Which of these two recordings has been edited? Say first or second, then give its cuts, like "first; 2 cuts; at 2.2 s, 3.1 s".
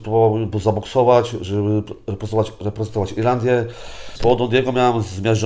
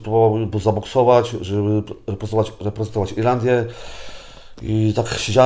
first; 1 cut; at 4.1 s